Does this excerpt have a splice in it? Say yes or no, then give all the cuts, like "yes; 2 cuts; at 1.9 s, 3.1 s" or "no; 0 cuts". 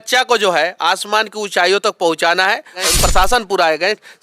yes; 1 cut; at 2.9 s